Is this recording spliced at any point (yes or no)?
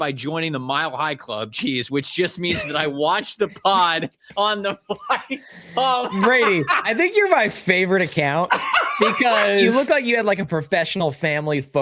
yes